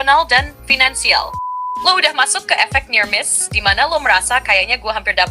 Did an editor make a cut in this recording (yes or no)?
yes